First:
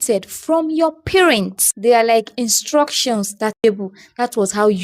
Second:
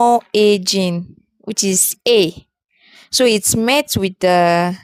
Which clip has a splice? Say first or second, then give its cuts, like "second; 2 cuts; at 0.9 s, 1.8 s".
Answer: first; 1 cut; at 3.6 s